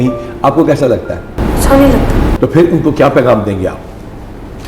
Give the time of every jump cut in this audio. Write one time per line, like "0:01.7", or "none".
none